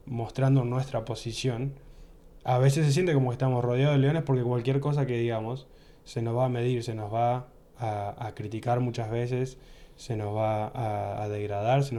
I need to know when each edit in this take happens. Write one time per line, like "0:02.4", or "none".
none